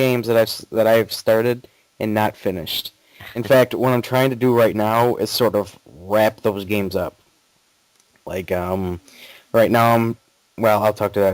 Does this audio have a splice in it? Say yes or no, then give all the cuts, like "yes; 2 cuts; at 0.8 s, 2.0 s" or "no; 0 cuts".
no; 0 cuts